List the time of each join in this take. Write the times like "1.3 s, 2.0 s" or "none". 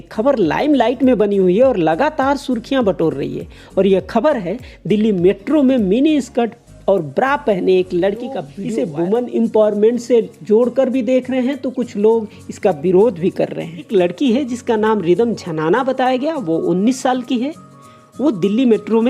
8.5 s, 13.9 s